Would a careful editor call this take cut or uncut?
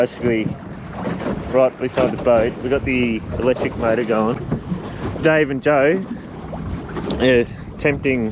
cut